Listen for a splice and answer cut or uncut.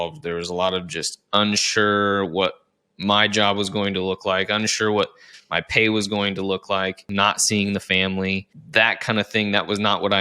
cut